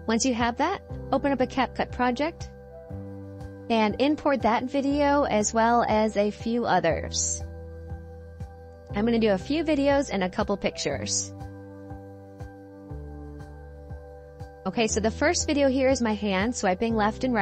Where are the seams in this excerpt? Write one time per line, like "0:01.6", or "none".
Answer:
0:07.1
0:08.9
0:11.2
0:14.5